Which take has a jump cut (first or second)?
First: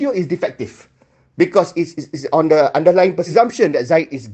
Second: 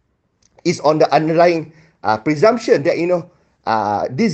first